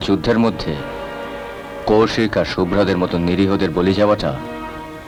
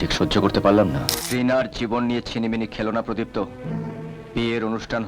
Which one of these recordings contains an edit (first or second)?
second